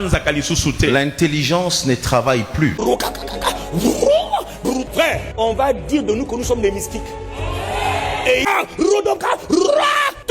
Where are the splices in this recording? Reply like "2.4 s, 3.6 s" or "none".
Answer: 2.8 s, 8.5 s